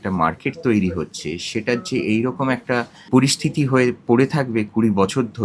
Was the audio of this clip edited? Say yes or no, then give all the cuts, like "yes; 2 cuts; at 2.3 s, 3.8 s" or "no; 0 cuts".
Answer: yes; 1 cut; at 2.9 s